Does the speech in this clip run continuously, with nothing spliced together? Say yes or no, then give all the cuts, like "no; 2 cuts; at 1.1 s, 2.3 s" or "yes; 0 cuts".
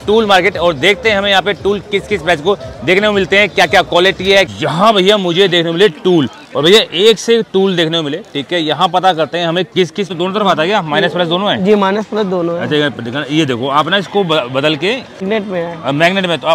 no; 3 cuts; at 4.5 s, 10.1 s, 15.2 s